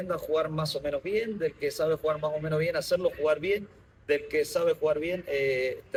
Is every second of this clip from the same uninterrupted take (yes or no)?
yes